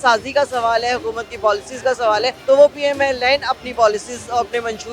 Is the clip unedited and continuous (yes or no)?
no